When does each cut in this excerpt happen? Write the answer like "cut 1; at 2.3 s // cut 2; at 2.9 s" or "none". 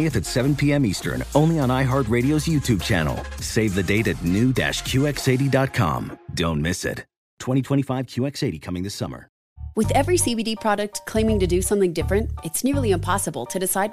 cut 1; at 9.5 s